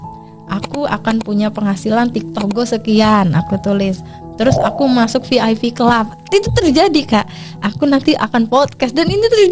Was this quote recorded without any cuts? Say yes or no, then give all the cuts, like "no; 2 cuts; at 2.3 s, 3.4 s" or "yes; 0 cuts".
yes; 0 cuts